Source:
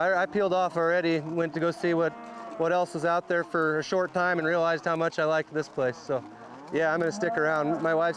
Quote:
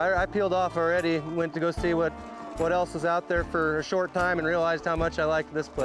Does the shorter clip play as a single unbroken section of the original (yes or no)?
yes